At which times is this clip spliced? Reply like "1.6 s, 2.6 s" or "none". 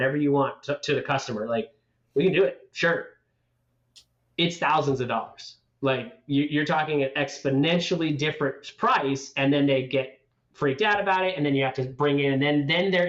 none